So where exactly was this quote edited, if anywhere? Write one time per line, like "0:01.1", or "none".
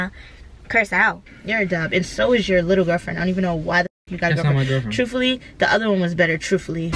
0:01.3